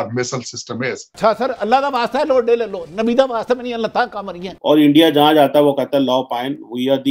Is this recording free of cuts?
no; 2 cuts; at 1.1 s, 4.6 s

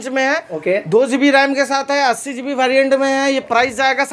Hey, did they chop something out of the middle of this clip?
no; 0 cuts

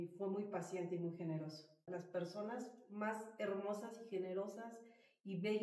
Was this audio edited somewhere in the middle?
yes; 1 cut; at 1.8 s

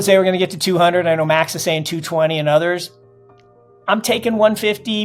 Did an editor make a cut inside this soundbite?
no; 0 cuts

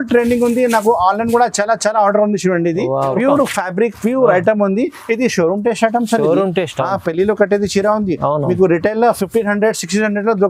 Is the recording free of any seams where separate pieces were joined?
no; 1 cut; at 3.1 s

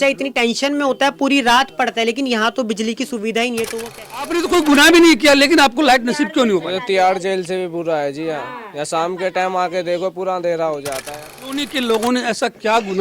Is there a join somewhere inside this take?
yes; 2 cuts; at 4.3 s, 11.5 s

